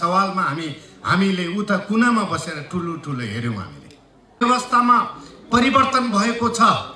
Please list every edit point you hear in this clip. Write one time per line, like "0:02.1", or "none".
0:04.4